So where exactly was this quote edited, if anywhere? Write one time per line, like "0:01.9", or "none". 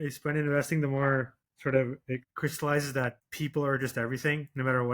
0:02.3
0:03.2